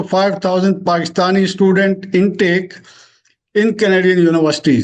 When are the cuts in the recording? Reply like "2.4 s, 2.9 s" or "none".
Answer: none